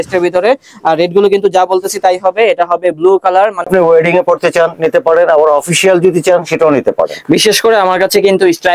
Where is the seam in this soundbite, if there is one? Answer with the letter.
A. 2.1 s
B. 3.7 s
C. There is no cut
B